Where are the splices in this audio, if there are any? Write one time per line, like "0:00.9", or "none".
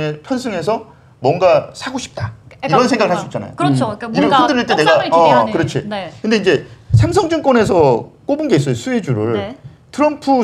none